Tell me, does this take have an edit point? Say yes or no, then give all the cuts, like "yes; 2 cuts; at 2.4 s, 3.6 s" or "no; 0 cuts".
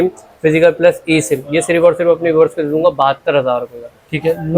no; 0 cuts